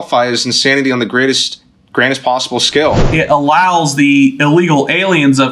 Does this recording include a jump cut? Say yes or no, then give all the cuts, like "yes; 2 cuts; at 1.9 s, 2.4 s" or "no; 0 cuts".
yes; 1 cut; at 3.0 s